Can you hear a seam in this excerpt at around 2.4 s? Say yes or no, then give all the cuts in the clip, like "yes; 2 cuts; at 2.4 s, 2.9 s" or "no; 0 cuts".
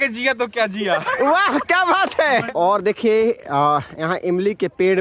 yes; 1 cut; at 2.4 s